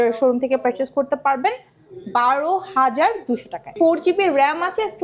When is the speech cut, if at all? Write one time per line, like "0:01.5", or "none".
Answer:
0:03.7

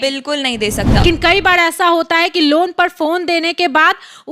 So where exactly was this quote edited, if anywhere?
0:01.0

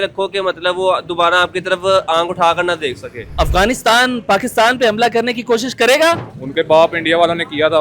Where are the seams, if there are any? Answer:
0:03.3
0:06.3

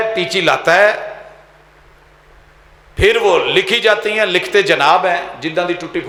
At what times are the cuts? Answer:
none

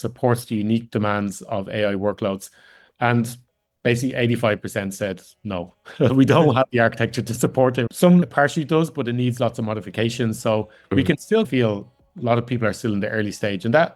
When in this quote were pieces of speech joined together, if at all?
0:08.2

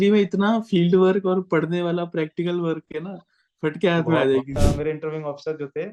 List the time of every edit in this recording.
0:04.5

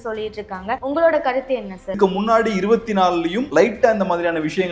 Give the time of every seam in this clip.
0:00.8
0:02.0
0:03.4

